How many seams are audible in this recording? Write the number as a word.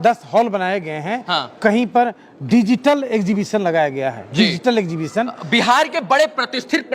zero